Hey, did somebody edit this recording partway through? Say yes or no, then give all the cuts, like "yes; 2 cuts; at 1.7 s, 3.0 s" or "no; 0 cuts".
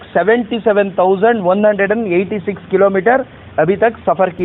no; 0 cuts